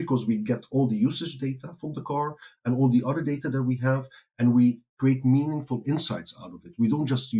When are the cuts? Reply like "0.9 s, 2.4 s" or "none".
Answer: 4.9 s

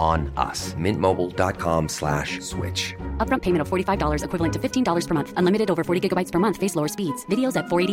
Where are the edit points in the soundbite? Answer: none

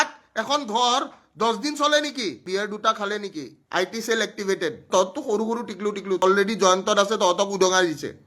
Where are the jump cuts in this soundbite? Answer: 2.4 s, 4.8 s, 6.2 s

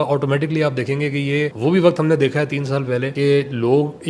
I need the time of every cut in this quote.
1.5 s, 3.1 s

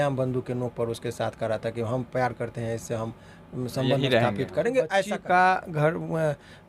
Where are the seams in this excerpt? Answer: 5.0 s

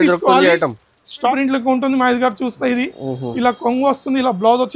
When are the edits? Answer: 1.2 s

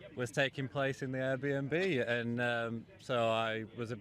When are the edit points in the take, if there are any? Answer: none

